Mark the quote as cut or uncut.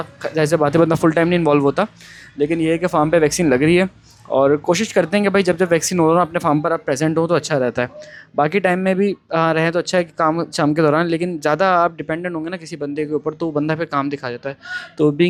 uncut